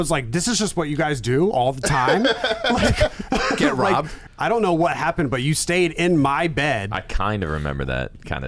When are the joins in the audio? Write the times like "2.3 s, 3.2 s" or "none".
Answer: 4.2 s